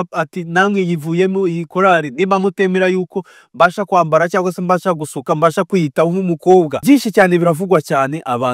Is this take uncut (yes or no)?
no